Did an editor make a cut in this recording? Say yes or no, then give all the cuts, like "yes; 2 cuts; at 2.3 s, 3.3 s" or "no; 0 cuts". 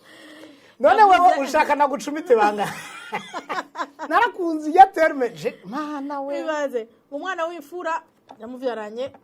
no; 0 cuts